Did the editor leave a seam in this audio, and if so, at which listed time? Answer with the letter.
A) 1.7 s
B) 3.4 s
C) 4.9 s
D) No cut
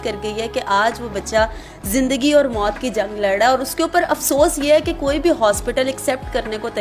D